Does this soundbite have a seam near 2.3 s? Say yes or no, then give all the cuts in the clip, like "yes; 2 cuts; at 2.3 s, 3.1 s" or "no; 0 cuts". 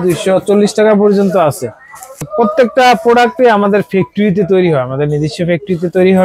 yes; 1 cut; at 2.3 s